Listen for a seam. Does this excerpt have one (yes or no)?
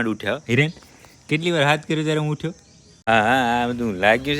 yes